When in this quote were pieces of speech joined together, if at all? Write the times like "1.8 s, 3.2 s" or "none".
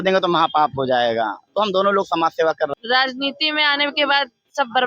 2.8 s